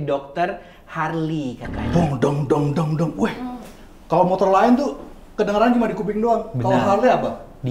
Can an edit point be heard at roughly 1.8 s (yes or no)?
yes